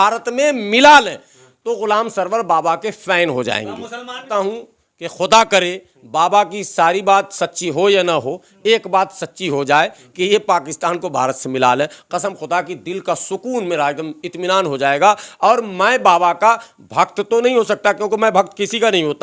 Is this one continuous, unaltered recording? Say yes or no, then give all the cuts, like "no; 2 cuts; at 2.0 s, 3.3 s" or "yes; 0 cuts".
no; 1 cut; at 4.3 s